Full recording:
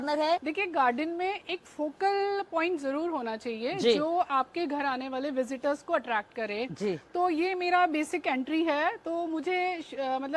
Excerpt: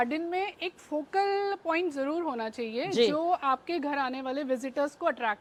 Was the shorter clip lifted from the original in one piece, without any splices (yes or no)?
yes